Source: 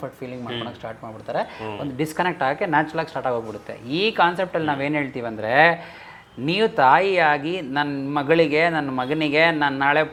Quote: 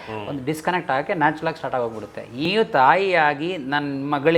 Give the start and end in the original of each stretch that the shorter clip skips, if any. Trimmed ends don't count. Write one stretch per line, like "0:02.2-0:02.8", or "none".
0:04.0-0:06.5